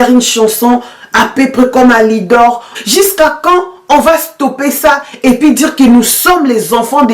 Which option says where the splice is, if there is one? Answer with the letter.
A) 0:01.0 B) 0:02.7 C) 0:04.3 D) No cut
B